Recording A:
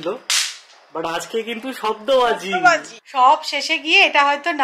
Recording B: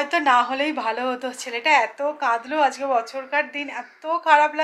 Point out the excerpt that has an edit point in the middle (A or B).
A